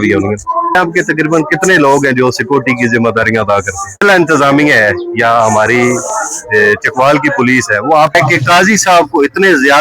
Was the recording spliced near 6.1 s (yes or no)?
no